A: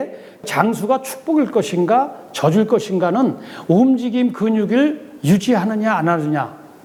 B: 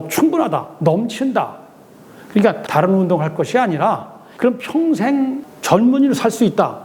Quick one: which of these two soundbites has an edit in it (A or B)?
B